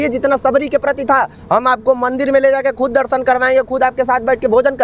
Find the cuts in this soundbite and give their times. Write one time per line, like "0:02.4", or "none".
none